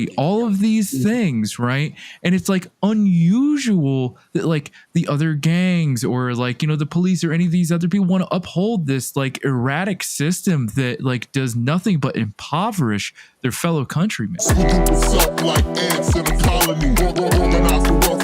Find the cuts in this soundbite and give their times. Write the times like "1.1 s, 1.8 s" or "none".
14.4 s